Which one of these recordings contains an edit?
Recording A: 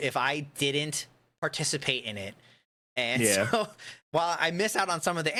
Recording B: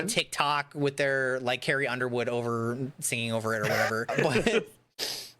B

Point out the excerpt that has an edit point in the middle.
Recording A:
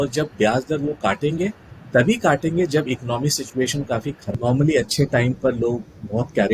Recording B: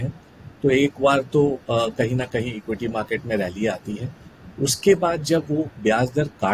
A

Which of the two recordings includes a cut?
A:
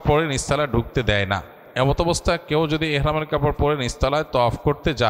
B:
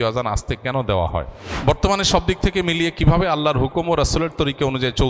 B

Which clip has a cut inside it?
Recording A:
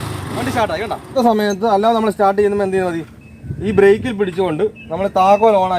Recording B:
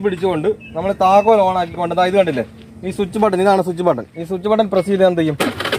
A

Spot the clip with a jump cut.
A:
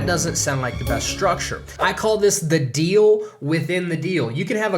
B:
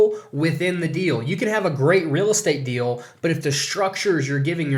A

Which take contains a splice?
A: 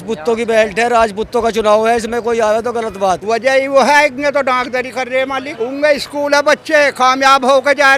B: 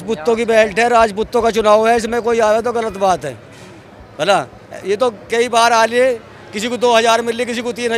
A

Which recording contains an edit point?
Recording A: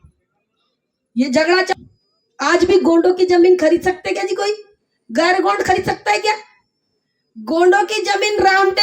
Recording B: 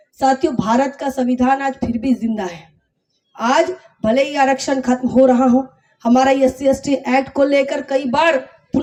A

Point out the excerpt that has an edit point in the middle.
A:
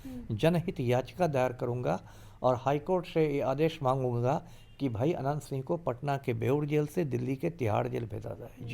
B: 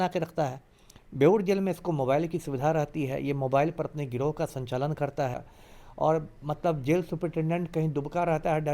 B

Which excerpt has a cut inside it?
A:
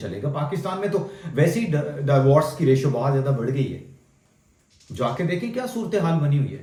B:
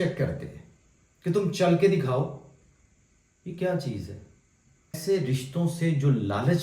B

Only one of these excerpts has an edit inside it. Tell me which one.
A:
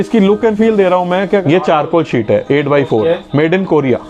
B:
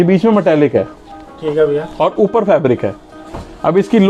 A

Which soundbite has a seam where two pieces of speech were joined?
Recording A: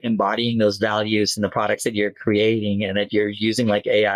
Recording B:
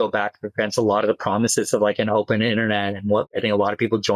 B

